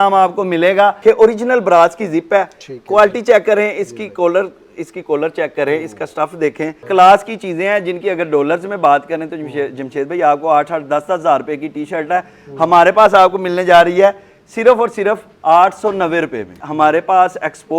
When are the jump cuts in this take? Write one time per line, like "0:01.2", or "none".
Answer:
0:01.0
0:06.8
0:16.6